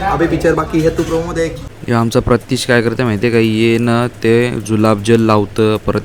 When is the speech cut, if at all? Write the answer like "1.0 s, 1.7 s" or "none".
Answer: 1.7 s